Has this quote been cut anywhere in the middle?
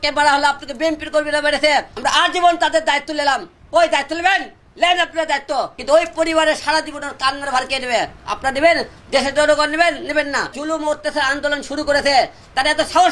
yes; 2 cuts; at 5.8 s, 10.6 s

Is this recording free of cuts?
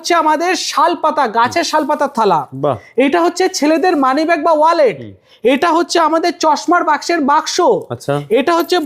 yes; 0 cuts

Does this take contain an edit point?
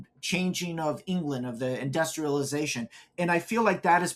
no; 0 cuts

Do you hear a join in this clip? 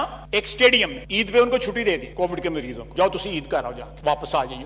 no; 0 cuts

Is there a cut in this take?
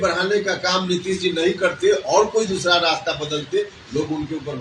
no; 0 cuts

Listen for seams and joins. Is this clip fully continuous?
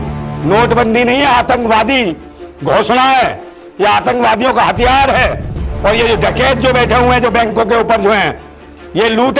yes; 0 cuts

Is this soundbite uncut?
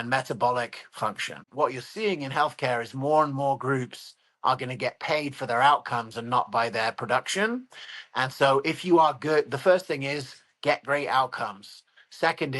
no; 1 cut; at 1.5 s

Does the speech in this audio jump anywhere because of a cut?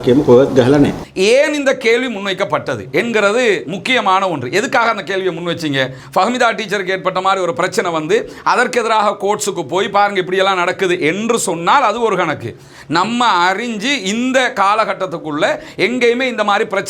yes; 1 cut; at 1.0 s

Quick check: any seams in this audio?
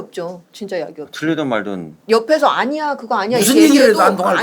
no; 0 cuts

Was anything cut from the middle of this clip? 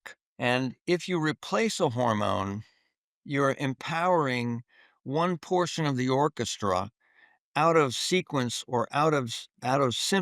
no; 0 cuts

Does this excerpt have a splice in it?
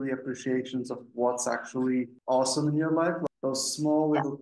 yes; 2 cuts; at 2.2 s, 3.2 s

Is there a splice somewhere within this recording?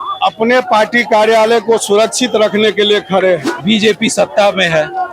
yes; 1 cut; at 3.5 s

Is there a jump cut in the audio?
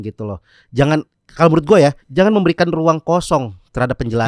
yes; 1 cut; at 2.0 s

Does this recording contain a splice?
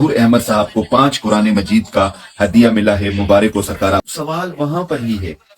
yes; 1 cut; at 4.0 s

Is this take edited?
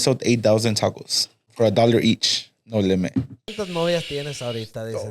yes; 2 cuts; at 1.5 s, 3.4 s

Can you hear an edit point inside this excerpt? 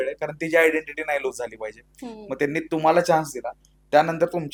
no; 0 cuts

